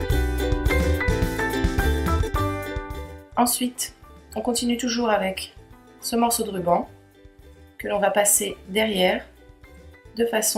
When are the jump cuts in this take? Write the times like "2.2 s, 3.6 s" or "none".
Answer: none

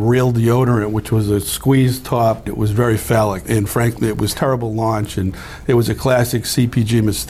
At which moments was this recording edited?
2.5 s, 4.3 s

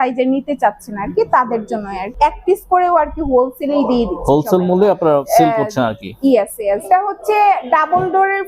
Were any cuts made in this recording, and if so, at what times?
2.1 s, 5.2 s, 6.9 s

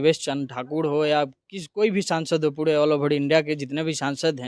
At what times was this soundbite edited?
none

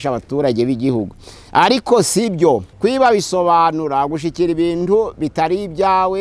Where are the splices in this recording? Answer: 2.7 s

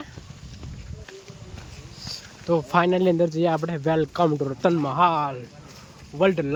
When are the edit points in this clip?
none

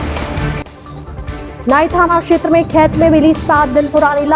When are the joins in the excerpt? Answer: none

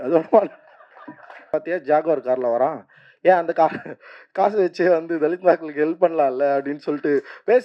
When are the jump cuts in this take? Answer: 1.4 s

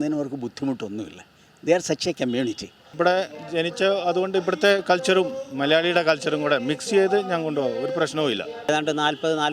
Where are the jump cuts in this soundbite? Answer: 2.8 s, 8.7 s

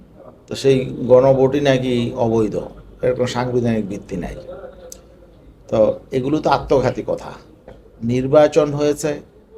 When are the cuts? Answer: 7.9 s

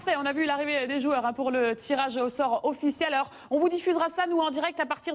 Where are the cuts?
none

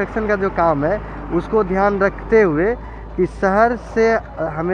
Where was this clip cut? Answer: none

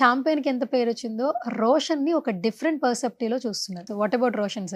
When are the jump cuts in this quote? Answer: 3.9 s

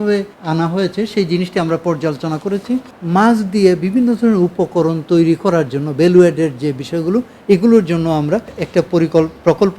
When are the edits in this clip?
2.9 s, 8.6 s

